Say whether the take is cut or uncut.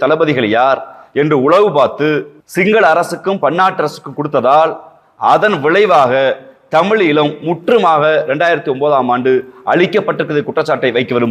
cut